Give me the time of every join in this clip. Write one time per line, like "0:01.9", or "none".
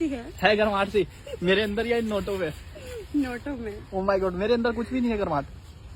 none

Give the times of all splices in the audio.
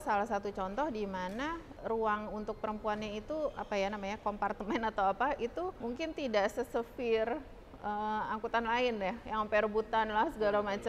0:01.7
0:05.8

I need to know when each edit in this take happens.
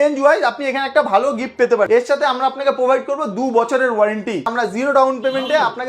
0:01.9
0:04.5

